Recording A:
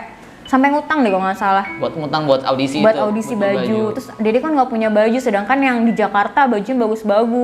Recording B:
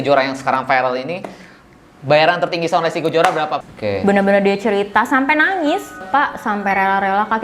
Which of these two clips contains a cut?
B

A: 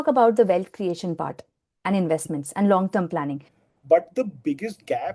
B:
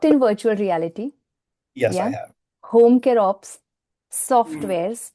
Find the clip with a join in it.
A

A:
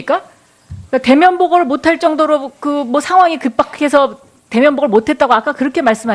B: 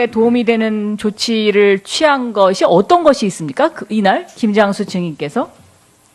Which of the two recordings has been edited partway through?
A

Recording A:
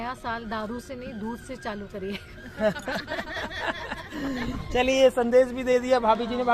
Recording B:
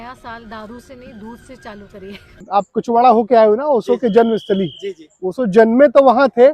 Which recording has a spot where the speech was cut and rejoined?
B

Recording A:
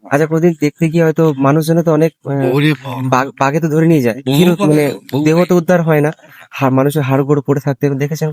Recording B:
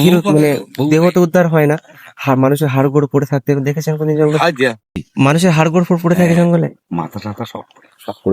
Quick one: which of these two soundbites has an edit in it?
B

